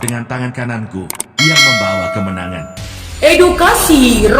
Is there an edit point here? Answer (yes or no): no